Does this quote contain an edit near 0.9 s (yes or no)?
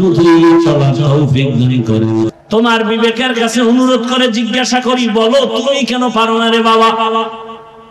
no